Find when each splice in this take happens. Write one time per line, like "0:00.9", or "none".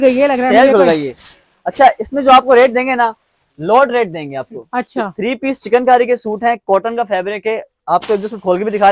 none